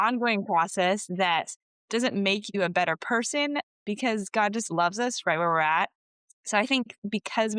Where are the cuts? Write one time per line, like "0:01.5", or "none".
0:03.8